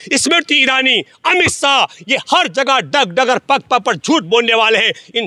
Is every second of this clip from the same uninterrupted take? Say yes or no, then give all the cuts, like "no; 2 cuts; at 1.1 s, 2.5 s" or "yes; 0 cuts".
yes; 0 cuts